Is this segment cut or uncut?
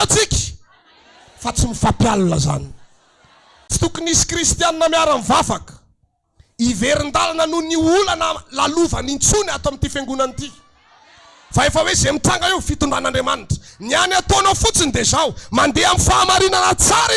cut